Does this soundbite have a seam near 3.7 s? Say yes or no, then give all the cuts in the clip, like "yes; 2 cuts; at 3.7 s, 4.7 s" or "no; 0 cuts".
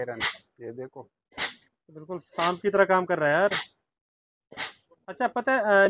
no; 0 cuts